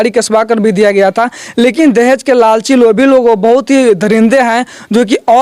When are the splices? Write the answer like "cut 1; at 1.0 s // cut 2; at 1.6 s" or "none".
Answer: none

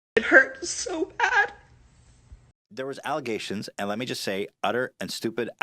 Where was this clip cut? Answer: cut 1; at 2.5 s

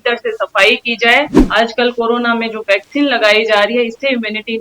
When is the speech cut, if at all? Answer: cut 1; at 1.4 s

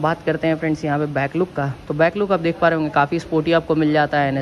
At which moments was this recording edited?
none

